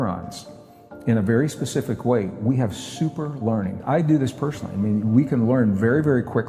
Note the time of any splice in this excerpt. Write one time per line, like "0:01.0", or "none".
0:03.8

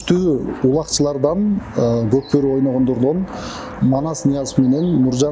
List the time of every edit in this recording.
none

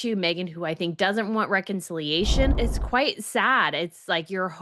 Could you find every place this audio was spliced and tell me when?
0:02.6

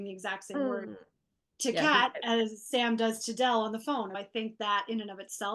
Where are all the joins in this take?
0:04.2

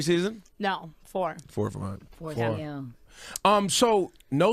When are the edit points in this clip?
0:01.2

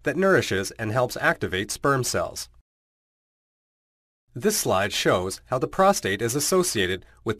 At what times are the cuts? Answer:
0:01.9

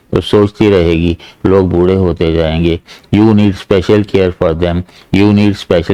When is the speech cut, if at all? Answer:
none

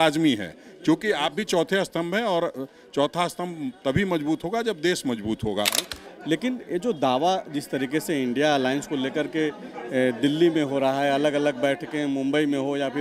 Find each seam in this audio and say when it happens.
0:05.9

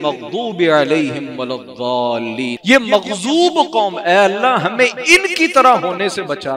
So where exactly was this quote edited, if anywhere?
0:02.6

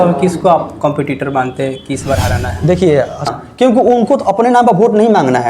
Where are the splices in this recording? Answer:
0:03.3

